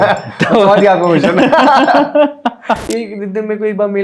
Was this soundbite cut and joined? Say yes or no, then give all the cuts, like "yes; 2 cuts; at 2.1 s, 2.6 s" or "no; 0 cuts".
yes; 1 cut; at 2.8 s